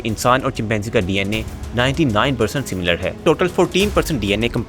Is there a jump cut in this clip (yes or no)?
yes